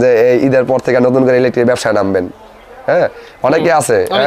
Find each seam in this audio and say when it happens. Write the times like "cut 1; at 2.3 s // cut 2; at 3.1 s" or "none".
none